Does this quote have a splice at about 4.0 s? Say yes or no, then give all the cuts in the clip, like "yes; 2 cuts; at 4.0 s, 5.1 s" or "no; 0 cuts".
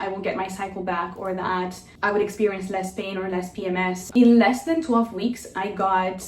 yes; 1 cut; at 4.0 s